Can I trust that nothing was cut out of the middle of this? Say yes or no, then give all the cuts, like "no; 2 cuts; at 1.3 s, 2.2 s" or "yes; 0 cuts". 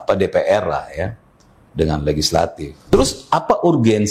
no; 1 cut; at 2.7 s